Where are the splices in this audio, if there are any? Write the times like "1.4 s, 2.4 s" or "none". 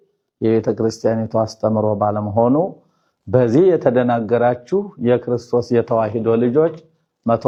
none